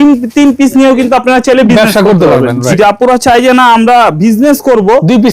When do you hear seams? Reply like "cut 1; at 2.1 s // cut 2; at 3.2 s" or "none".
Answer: cut 1; at 2.6 s